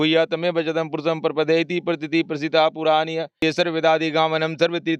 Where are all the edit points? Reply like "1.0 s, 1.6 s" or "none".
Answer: 3.4 s